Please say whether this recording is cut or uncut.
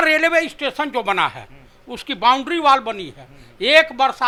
uncut